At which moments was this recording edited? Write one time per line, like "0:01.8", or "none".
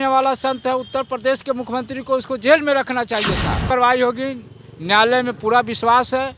0:03.7